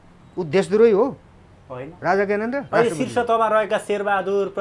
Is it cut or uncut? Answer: cut